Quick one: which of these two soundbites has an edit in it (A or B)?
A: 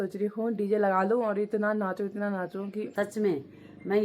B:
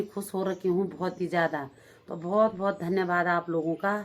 A